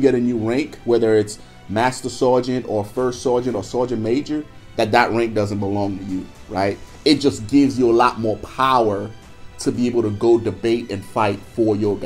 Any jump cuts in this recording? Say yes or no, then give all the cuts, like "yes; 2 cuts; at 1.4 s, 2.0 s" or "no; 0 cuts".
no; 0 cuts